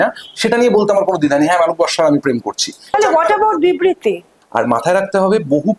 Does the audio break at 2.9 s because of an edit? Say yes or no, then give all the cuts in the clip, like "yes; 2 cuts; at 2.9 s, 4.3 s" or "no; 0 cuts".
yes; 2 cuts; at 2.9 s, 4.4 s